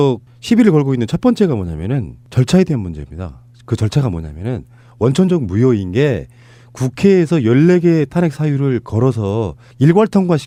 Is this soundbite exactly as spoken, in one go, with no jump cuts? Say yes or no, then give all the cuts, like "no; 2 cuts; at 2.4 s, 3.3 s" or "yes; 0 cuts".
yes; 0 cuts